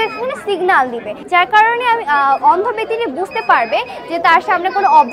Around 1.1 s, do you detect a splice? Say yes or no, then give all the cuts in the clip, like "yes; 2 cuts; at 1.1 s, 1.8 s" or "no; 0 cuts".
yes; 1 cut; at 1.1 s